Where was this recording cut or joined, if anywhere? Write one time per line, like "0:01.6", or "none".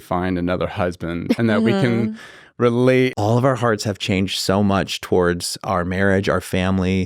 0:01.4
0:03.1